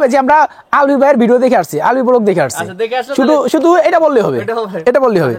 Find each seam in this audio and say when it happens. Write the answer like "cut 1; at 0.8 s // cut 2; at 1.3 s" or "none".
none